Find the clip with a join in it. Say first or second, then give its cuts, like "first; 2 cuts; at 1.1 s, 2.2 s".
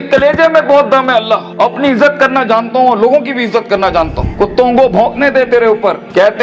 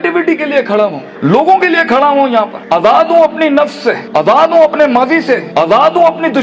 first; 1 cut; at 4.3 s